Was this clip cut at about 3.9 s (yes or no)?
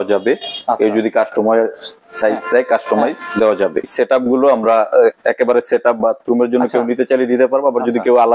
yes